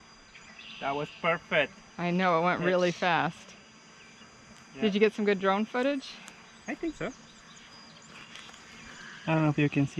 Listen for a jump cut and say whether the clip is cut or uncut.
uncut